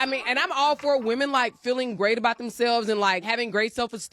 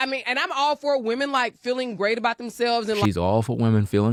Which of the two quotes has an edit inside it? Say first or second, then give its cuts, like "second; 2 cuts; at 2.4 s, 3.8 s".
first; 1 cut; at 3.0 s